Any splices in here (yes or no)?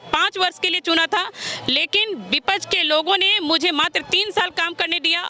no